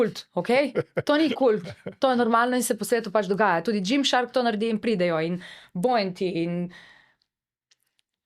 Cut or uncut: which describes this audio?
uncut